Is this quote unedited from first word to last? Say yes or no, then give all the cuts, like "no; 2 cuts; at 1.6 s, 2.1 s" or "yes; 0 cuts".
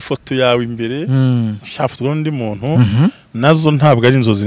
yes; 0 cuts